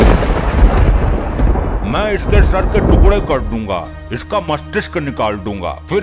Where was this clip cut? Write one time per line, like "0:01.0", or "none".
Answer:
none